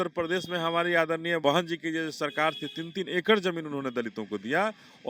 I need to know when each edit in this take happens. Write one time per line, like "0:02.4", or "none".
0:01.4